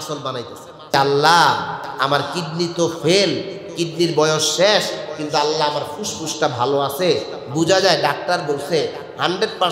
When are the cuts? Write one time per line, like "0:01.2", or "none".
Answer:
0:00.9